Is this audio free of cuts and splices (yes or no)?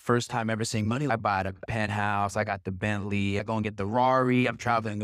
no